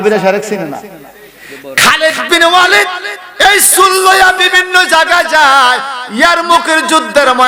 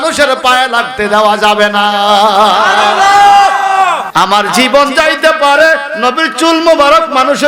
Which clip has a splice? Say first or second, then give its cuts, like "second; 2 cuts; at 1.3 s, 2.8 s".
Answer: second; 1 cut; at 4.0 s